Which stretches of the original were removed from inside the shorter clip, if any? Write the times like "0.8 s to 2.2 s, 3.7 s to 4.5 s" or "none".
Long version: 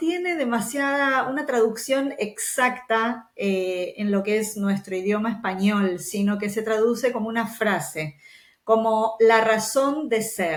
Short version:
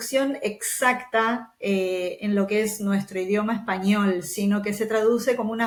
none